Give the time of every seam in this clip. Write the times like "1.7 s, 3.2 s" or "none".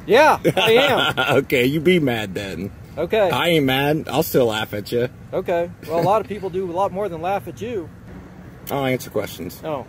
8.0 s